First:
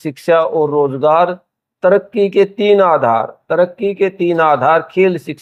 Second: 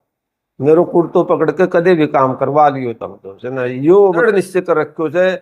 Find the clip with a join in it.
second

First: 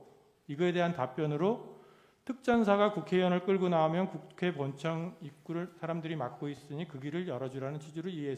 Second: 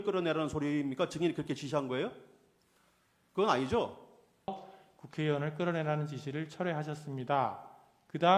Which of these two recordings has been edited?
second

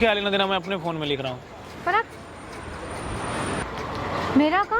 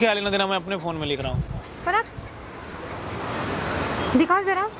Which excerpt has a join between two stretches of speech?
first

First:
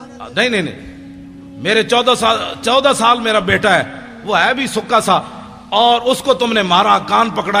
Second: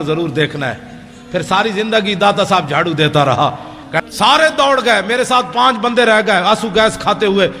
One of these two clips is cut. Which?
second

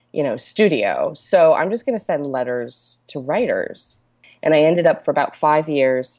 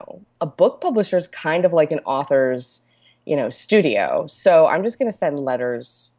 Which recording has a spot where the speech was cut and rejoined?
first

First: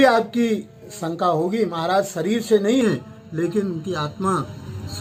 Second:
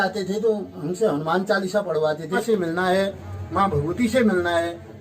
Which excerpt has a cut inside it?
second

